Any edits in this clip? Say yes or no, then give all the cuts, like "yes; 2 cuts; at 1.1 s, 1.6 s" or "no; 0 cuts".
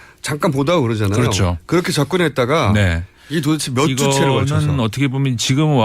no; 0 cuts